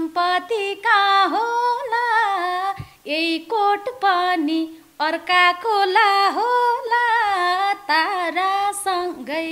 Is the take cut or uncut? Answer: uncut